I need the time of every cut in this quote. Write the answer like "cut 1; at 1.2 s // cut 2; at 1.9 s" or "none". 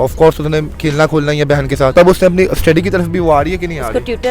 cut 1; at 1.9 s